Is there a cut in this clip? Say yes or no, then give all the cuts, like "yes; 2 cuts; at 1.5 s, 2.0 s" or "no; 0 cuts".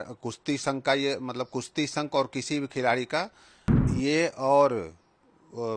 yes; 1 cut; at 3.8 s